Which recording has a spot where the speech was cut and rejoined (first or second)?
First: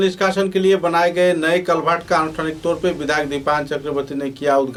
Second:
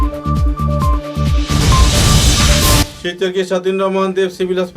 second